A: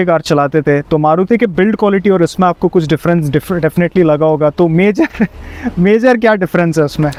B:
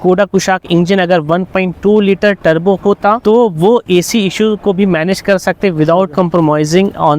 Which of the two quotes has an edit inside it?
B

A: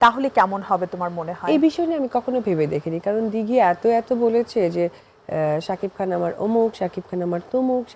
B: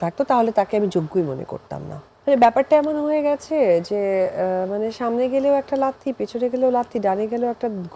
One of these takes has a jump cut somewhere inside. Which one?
B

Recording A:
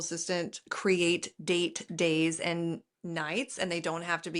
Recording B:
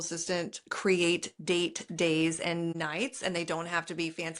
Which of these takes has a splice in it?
B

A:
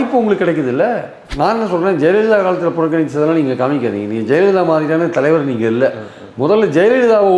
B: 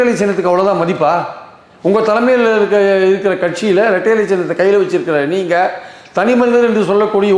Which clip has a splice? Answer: A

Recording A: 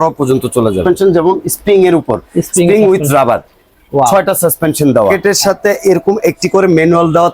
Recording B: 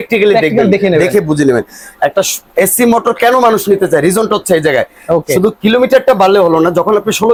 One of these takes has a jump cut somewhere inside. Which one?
A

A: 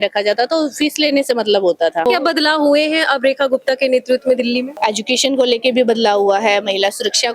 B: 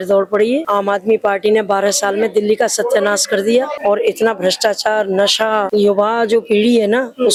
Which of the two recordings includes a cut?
A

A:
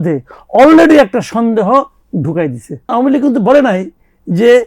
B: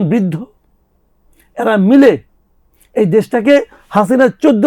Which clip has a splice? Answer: A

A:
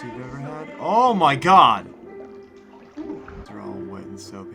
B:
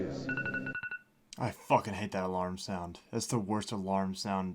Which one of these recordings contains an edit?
A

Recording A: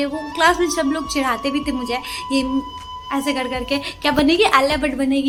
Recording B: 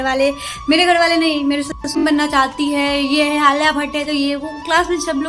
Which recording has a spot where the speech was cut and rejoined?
B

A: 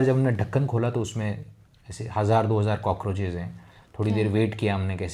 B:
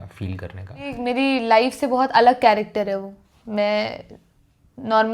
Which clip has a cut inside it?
B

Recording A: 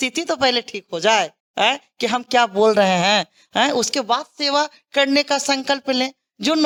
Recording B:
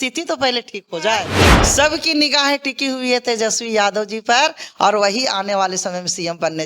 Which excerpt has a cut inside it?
B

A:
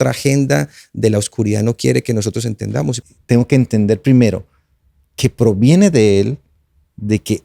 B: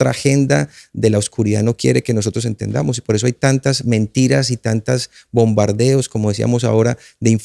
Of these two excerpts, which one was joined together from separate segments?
A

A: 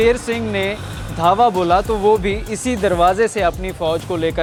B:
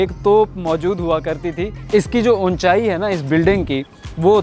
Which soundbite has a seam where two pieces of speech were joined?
B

